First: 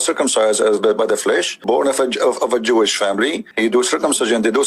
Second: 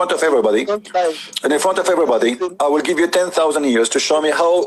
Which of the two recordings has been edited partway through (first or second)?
first